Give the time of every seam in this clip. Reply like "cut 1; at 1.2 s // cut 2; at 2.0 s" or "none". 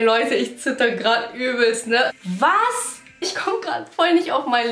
cut 1; at 2.1 s // cut 2; at 3.3 s